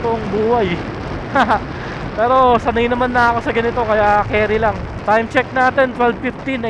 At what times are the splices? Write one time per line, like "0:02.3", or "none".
0:04.9